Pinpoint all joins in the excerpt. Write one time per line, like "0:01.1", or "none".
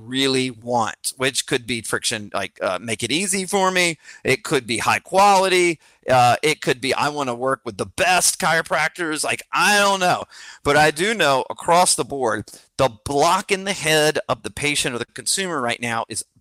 0:10.4